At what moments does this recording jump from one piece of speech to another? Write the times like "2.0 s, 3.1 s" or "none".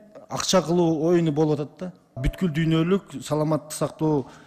2.3 s